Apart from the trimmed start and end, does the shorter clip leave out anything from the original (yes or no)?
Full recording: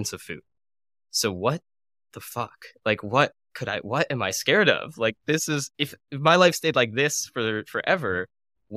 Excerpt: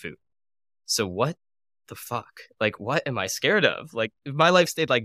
yes